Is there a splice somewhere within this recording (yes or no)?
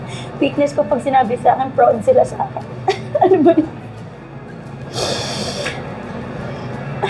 no